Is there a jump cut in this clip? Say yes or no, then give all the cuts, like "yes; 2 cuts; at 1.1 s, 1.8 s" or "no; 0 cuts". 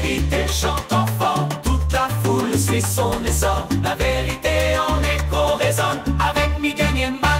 no; 0 cuts